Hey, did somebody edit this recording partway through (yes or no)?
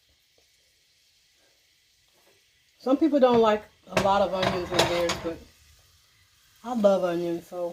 no